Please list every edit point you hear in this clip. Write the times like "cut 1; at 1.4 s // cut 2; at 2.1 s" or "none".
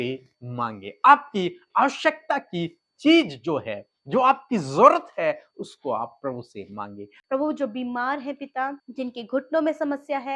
cut 1; at 7.1 s // cut 2; at 8.8 s